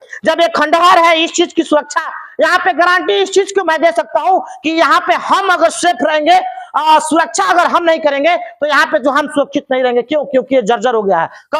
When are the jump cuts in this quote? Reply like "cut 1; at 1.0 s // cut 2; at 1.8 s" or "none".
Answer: none